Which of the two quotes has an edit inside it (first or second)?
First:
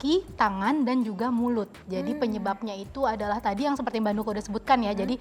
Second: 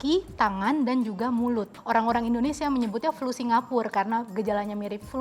second